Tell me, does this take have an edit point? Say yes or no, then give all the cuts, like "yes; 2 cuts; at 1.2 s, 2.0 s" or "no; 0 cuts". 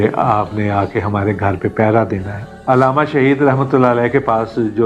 no; 0 cuts